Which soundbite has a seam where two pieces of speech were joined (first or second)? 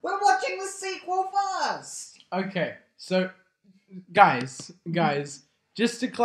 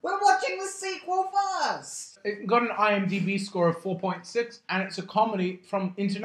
second